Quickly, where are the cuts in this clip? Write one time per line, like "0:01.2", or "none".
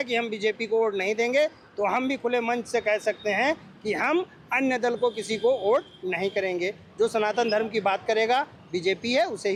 none

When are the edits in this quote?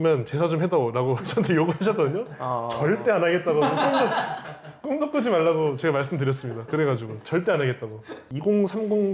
0:08.2

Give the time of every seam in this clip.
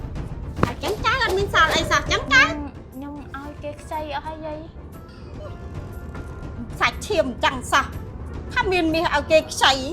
none

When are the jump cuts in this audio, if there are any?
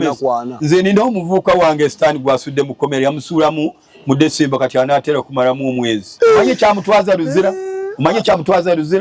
0:06.1

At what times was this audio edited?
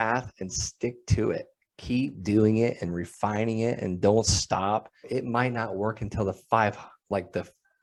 none

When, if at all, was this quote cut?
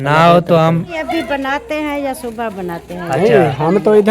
0:00.9

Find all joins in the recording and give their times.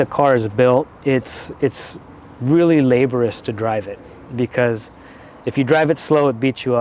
none

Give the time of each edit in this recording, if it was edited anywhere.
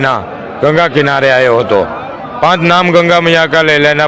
none

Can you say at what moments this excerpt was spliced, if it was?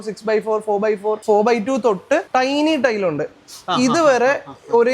0:02.3

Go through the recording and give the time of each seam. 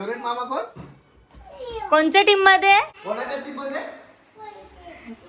0:03.0

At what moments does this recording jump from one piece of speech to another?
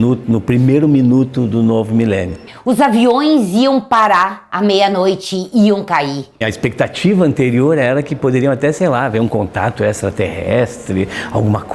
0:02.5
0:06.5

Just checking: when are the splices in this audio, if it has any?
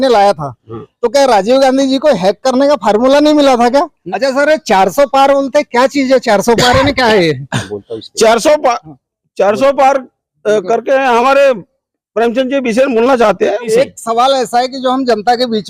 0:04.0
0:13.7

